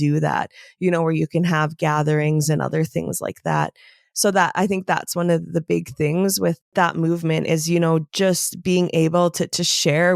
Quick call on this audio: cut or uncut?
cut